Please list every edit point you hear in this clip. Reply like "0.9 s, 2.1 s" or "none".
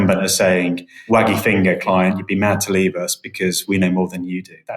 1.0 s